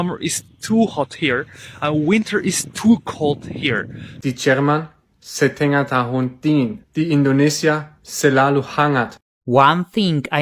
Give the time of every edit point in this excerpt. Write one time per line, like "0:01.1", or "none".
0:04.1
0:09.2